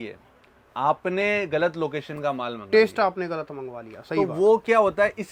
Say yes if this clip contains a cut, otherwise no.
no